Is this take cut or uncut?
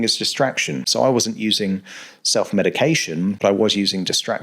cut